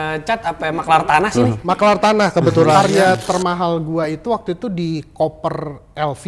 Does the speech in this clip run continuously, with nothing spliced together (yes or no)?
no